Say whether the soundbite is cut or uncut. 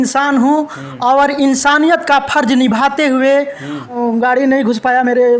cut